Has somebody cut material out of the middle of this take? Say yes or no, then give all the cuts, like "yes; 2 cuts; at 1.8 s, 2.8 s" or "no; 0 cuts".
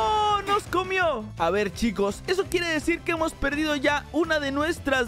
no; 0 cuts